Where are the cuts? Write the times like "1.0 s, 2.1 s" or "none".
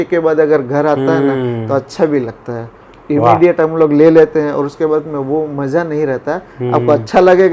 none